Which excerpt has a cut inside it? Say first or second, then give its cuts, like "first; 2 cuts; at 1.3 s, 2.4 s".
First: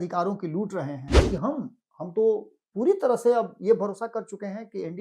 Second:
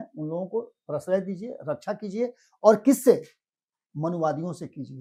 first; 1 cut; at 1.1 s